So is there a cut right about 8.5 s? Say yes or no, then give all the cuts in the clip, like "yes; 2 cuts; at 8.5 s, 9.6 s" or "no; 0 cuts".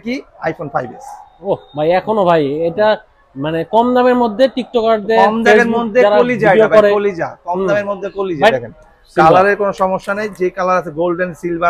yes; 1 cut; at 8.5 s